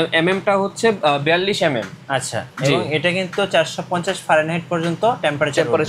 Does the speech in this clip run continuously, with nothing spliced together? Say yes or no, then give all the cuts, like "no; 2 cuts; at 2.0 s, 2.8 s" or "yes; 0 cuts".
yes; 0 cuts